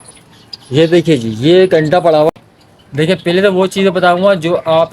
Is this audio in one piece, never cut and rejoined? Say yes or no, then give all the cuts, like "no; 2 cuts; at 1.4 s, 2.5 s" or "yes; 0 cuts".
no; 1 cut; at 2.3 s